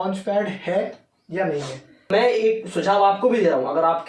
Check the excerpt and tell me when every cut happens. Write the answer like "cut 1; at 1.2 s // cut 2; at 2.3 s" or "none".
cut 1; at 2.1 s